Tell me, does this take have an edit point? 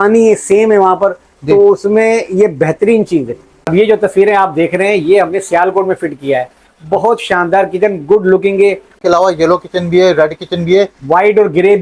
yes; 2 cuts; at 3.8 s, 9.0 s

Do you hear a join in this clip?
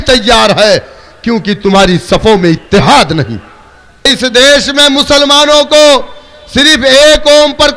yes; 1 cut; at 4.1 s

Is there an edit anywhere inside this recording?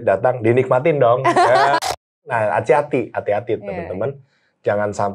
yes; 1 cut; at 1.9 s

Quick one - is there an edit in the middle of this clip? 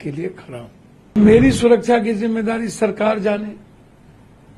yes; 1 cut; at 1.1 s

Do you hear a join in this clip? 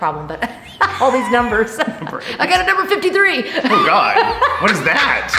no; 0 cuts

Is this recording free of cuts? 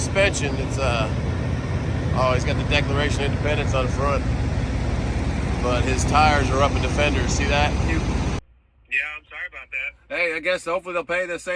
no; 1 cut; at 8.4 s

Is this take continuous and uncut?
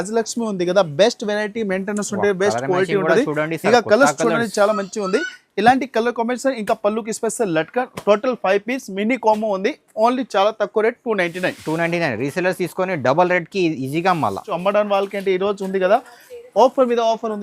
no; 1 cut; at 14.5 s

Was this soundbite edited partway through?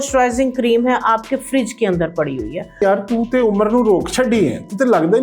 yes; 1 cut; at 2.8 s

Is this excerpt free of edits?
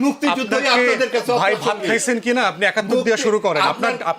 yes; 0 cuts

